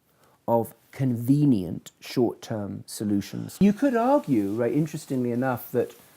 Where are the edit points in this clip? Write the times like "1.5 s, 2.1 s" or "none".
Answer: 3.6 s